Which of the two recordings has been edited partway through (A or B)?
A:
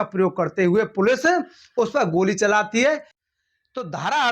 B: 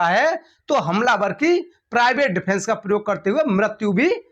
A